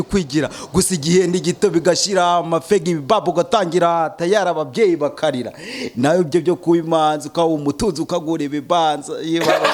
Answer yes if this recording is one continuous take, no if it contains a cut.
yes